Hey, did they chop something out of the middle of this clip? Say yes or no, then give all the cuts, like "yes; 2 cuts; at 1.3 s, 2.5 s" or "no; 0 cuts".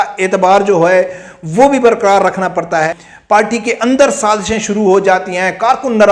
yes; 1 cut; at 2.9 s